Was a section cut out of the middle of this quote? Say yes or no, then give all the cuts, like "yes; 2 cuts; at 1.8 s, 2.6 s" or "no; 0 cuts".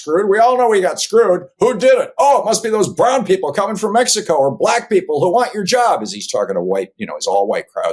no; 0 cuts